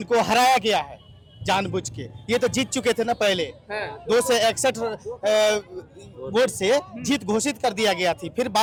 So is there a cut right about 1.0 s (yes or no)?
no